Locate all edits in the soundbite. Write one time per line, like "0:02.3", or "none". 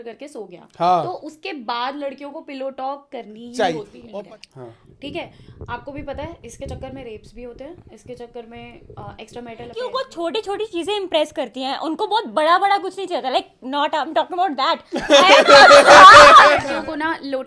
0:04.0
0:09.8
0:16.6